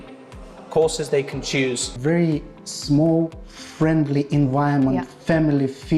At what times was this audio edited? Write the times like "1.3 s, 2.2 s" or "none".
1.9 s